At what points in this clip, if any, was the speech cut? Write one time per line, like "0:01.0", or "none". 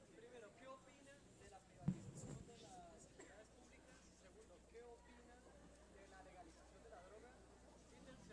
0:01.7